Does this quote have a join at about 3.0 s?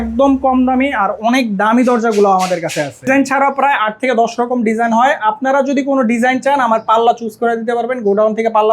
yes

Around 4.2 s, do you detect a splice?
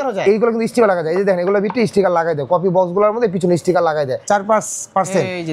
yes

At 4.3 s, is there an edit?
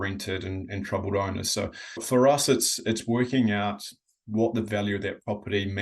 no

